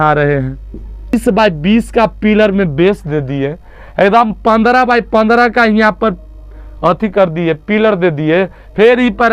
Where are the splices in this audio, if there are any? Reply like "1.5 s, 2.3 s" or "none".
1.1 s